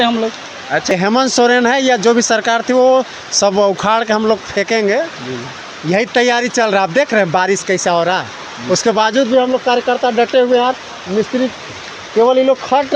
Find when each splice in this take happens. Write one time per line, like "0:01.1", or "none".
0:00.9